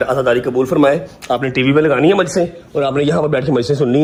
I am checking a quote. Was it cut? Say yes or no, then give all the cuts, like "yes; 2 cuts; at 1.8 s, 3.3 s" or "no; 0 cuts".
no; 0 cuts